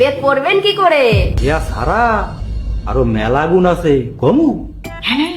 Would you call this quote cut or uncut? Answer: cut